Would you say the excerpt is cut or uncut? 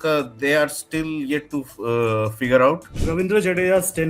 cut